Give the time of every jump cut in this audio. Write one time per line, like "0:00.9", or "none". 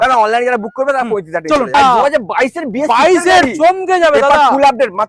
0:01.7